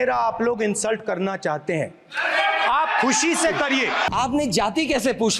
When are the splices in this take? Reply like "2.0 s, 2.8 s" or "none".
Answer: 4.1 s